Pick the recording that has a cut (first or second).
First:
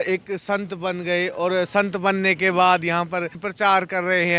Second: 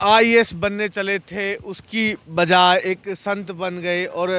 first